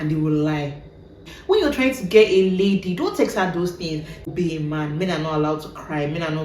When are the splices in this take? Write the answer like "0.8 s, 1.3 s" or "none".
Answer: 1.3 s, 4.2 s